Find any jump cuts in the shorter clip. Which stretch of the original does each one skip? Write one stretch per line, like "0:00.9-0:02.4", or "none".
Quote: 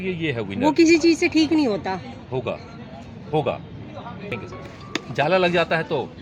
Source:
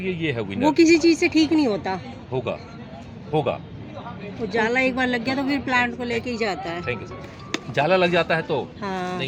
0:04.3-0:06.9